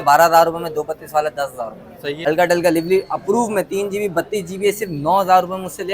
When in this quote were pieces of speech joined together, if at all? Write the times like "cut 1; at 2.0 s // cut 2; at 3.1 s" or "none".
cut 1; at 2.2 s